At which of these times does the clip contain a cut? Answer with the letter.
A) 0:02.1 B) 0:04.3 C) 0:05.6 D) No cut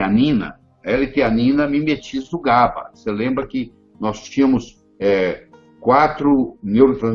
D